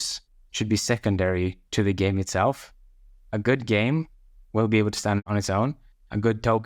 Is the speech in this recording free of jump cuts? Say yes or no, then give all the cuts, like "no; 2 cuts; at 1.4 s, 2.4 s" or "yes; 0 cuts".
yes; 0 cuts